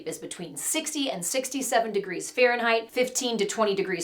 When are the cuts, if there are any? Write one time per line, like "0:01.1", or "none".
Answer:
none